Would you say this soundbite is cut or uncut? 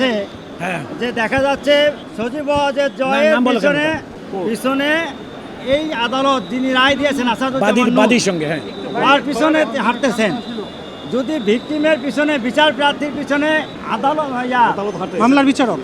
cut